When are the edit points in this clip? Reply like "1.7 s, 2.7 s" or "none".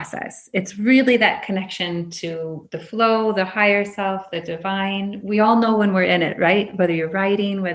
none